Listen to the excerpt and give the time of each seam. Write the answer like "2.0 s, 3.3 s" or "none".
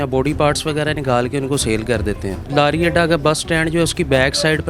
2.5 s

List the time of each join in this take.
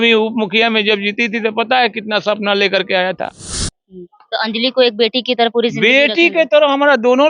3.5 s

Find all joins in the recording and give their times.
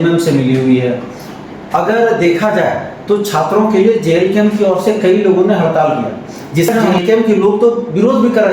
6.8 s

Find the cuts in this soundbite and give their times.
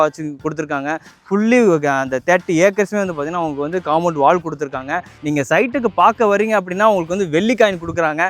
1.1 s, 5.1 s

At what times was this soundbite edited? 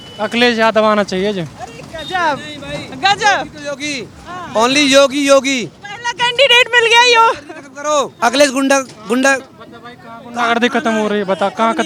none

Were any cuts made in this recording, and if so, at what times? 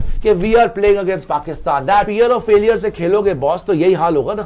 2.1 s

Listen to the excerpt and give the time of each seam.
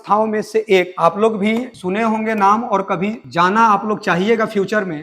0.9 s

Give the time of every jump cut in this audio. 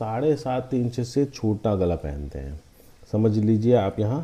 none

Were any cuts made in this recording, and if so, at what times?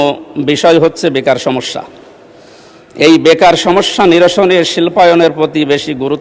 none

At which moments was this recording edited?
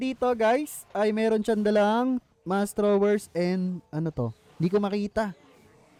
none

